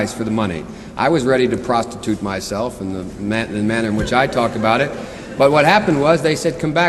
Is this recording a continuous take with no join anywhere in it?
yes; 0 cuts

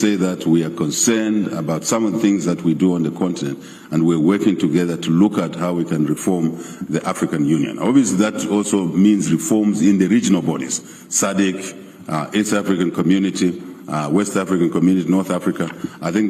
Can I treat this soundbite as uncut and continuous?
yes; 0 cuts

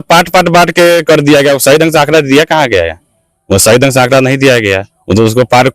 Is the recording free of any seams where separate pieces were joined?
yes; 0 cuts

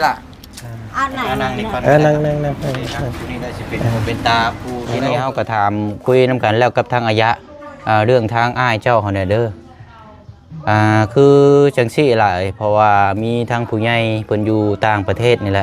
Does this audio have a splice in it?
yes; 1 cut; at 5.1 s

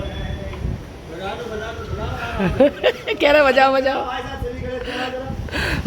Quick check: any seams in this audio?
no; 0 cuts

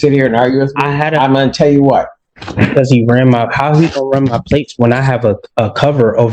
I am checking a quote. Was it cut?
yes; 1 cut; at 2.2 s

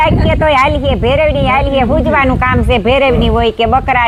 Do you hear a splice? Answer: no; 0 cuts

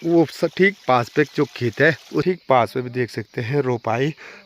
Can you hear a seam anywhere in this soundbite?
yes; 1 cut; at 2.2 s

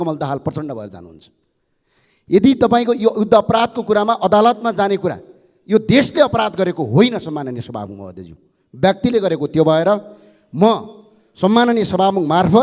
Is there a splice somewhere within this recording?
no; 0 cuts

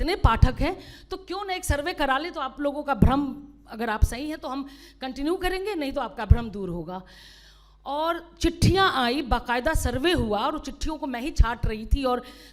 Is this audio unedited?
yes; 0 cuts

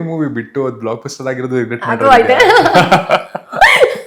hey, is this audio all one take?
yes; 0 cuts

